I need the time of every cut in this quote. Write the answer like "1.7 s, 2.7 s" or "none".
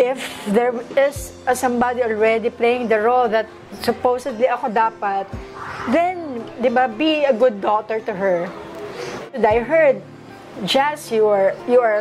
9.2 s